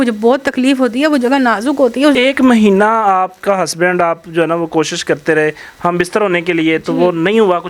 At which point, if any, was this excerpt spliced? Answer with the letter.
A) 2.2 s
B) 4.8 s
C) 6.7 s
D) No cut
A